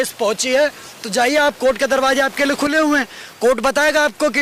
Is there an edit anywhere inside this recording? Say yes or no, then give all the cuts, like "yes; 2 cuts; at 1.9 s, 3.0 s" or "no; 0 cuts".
no; 0 cuts